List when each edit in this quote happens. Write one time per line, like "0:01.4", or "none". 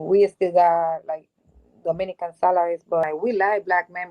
0:03.0